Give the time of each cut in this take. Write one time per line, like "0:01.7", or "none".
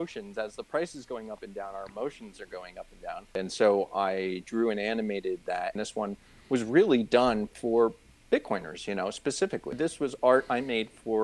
0:03.3
0:05.7
0:09.7